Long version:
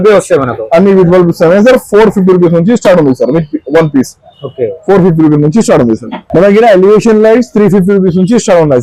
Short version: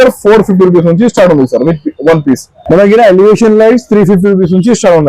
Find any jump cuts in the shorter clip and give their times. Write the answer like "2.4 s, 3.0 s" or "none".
2.5 s